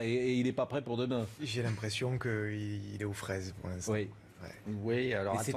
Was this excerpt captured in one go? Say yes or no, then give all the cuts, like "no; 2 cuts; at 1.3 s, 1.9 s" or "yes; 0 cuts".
yes; 0 cuts